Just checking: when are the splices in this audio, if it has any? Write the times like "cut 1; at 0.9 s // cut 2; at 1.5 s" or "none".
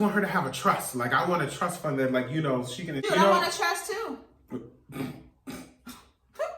cut 1; at 3.0 s